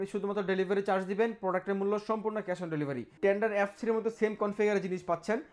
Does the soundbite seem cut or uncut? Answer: cut